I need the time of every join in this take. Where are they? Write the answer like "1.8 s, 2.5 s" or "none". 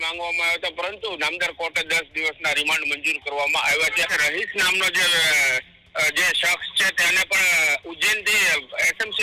4.1 s